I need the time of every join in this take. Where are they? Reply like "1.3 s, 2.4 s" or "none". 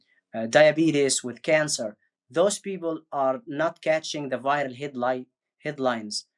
none